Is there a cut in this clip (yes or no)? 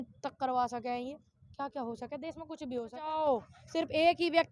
yes